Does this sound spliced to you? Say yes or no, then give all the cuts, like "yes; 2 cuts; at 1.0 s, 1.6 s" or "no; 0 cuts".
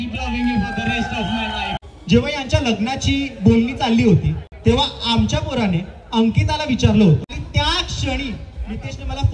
yes; 2 cuts; at 1.7 s, 7.4 s